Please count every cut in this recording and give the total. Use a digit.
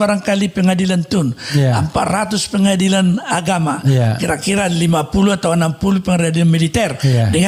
0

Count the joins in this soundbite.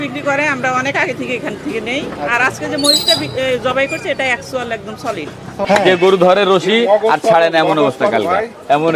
1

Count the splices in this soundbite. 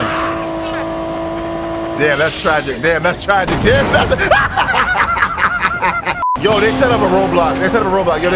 1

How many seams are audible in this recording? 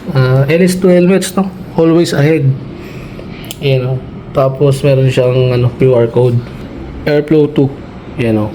1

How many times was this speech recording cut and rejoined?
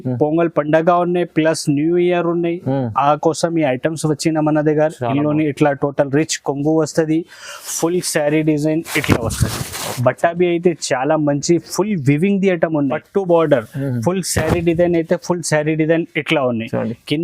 1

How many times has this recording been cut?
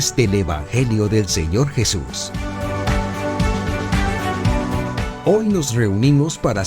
2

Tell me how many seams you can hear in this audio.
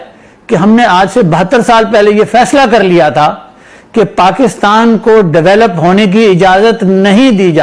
0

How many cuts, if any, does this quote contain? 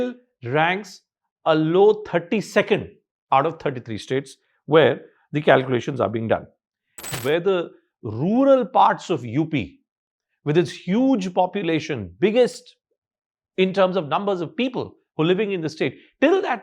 1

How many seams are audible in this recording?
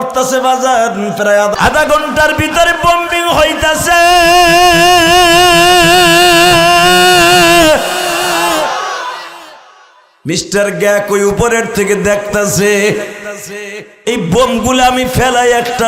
1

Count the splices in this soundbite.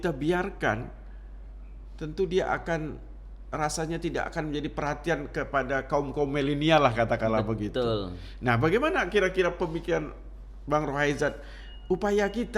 0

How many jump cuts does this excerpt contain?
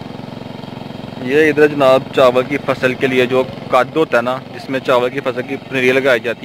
0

